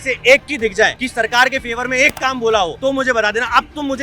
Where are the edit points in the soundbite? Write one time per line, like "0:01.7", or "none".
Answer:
0:01.0
0:02.7

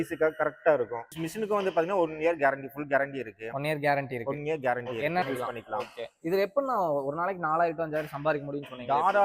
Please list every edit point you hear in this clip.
0:01.2
0:05.2

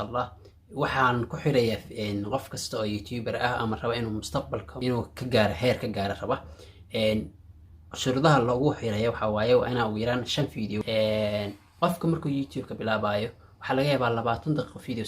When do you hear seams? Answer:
0:04.9
0:10.8

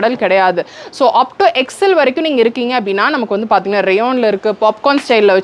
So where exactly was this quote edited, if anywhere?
none

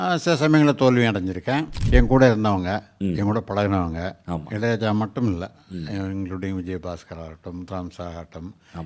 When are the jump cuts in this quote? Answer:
0:01.7

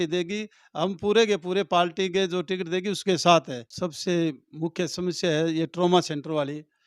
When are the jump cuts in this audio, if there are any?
0:03.6

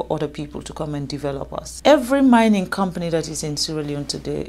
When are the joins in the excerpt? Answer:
0:01.7

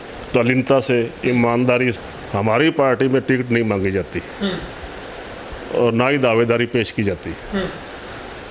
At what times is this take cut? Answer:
0:01.9

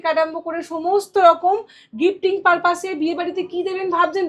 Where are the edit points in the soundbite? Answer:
none

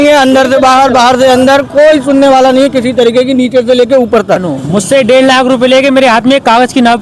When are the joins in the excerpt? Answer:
0:04.5

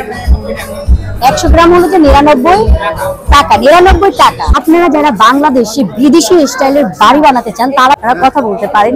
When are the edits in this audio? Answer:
0:04.5
0:08.0

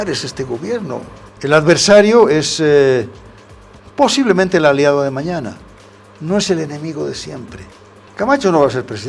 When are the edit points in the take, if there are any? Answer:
0:01.2
0:08.0

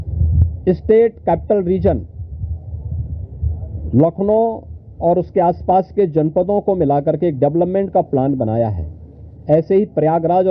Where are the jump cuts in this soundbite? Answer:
none

